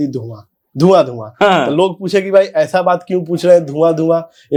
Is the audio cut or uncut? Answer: uncut